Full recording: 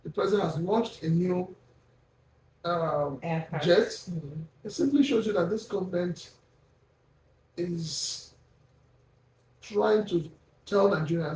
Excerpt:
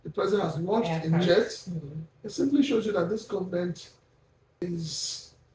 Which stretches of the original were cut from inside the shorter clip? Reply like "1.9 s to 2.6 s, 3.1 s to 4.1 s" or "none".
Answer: 1.2 s to 3.6 s, 7.0 s to 7.6 s